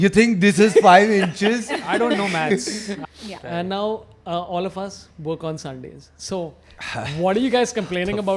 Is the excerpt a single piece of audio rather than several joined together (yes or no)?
no